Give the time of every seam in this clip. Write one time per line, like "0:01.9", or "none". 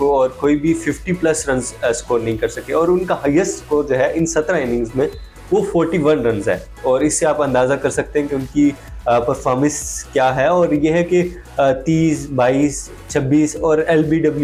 none